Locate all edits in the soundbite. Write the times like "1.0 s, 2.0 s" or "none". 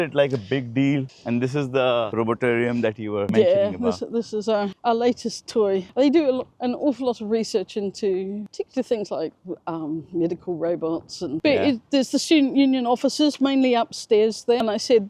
1.2 s, 11.4 s